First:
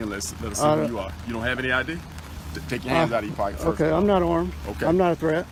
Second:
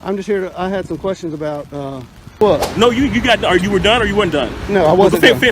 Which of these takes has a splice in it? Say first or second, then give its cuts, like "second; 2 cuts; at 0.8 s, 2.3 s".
second; 1 cut; at 2.4 s